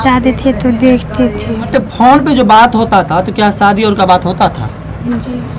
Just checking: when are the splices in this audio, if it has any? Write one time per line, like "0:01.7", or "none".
0:01.7